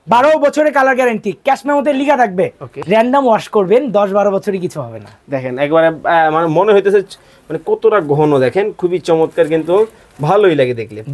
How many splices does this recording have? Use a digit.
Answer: 1